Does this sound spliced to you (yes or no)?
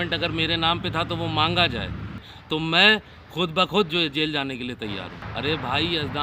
yes